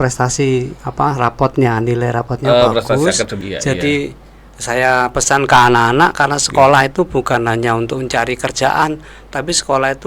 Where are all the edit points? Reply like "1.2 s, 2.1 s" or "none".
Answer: 3.5 s